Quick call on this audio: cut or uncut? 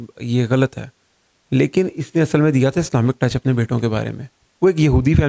cut